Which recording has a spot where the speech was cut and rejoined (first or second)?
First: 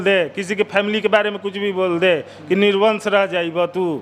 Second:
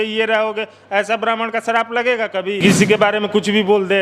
second